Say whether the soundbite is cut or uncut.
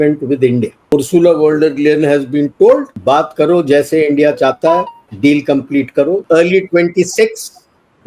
cut